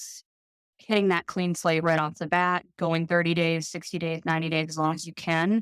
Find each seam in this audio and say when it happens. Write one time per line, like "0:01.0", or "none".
none